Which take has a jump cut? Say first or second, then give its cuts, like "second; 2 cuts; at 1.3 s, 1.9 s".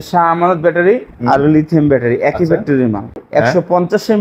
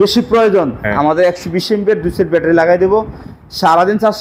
first; 1 cut; at 3.2 s